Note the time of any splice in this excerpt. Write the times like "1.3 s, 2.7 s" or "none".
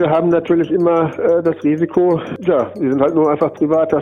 2.3 s